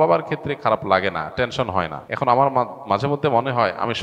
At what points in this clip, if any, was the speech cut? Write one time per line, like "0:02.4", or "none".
0:02.0